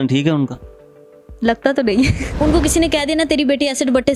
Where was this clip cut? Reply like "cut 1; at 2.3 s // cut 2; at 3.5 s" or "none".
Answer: cut 1; at 2.3 s